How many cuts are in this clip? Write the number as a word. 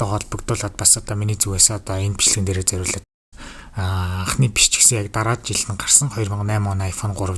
zero